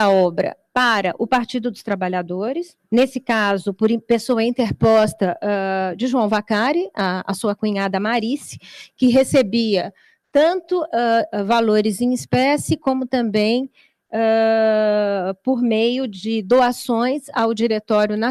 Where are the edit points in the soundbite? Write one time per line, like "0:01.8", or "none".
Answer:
none